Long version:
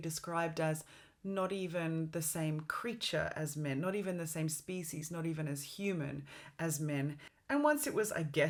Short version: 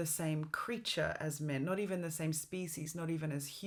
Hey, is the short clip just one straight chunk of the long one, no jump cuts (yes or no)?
yes